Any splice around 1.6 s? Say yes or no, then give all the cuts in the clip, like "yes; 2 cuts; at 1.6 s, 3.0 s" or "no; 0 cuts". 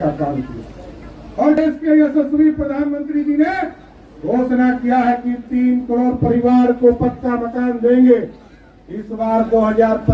yes; 1 cut; at 1.6 s